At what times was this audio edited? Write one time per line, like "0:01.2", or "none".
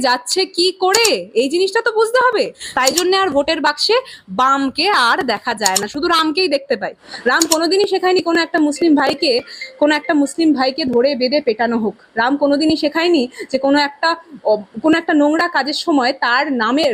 0:02.6
0:07.0